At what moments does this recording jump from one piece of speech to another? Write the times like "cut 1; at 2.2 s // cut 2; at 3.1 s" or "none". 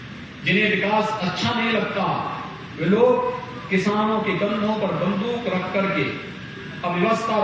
none